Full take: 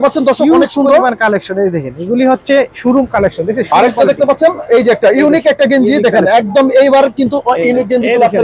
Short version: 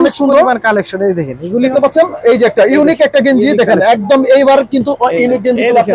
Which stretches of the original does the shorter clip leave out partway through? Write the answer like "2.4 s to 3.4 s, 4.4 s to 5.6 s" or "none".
2.3 s to 4.2 s